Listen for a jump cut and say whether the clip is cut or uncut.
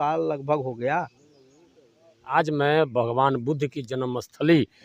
cut